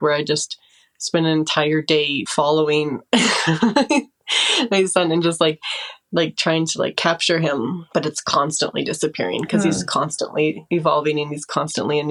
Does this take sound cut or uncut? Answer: uncut